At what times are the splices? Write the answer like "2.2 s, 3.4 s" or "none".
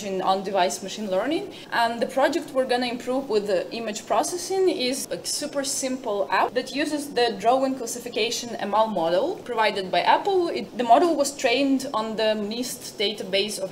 1.6 s, 5.0 s, 6.5 s, 9.4 s, 10.7 s